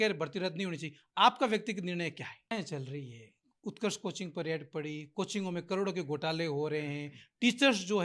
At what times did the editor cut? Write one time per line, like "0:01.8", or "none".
0:02.5